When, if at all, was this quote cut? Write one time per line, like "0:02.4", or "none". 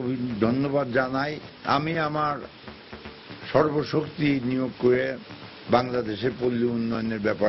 0:01.5